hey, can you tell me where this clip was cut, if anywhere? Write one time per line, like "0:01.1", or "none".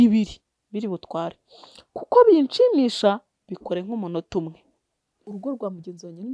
0:05.2

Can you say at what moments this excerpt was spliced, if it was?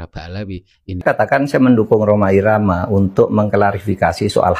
0:01.0

